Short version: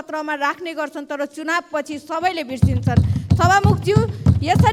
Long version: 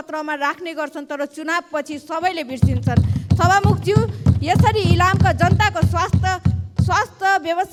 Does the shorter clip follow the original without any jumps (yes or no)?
yes